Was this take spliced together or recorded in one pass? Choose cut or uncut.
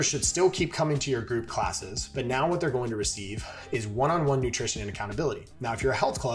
uncut